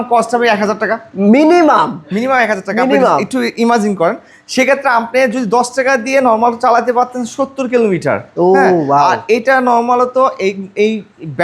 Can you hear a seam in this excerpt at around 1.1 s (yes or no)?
no